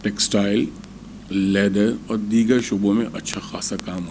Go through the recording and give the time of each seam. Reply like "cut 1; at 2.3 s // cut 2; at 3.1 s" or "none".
none